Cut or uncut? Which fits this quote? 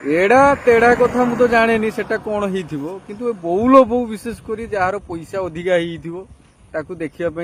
uncut